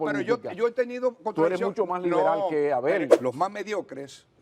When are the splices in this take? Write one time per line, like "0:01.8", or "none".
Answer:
0:03.1